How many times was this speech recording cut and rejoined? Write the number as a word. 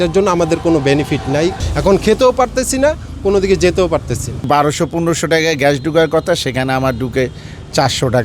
two